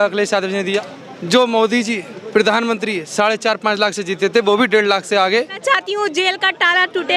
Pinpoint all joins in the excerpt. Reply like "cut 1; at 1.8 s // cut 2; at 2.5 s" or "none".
cut 1; at 0.9 s // cut 2; at 5.6 s